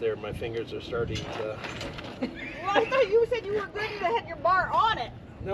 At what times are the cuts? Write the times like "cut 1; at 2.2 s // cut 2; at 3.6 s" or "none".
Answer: cut 1; at 2.1 s